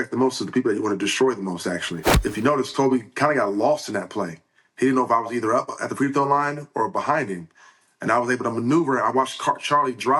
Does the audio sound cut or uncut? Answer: cut